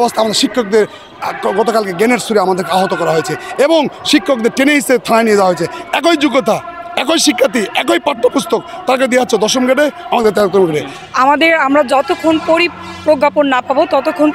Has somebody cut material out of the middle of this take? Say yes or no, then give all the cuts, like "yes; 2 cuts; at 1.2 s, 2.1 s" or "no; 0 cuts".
yes; 2 cuts; at 5.8 s, 11.0 s